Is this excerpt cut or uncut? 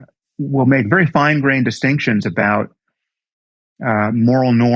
uncut